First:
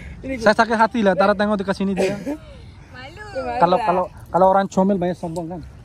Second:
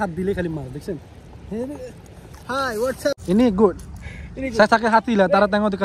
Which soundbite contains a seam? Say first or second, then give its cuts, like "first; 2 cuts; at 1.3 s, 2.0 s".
second; 1 cut; at 3.1 s